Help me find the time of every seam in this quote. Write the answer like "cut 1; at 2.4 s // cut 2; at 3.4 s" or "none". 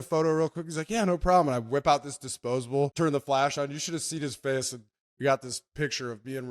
cut 1; at 2.9 s